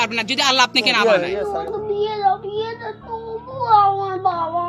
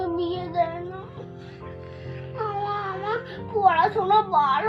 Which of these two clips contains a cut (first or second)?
first